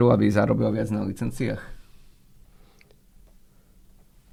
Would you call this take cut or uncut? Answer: uncut